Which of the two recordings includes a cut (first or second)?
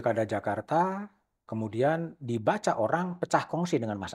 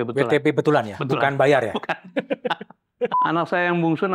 second